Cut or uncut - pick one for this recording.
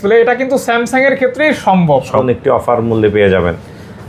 cut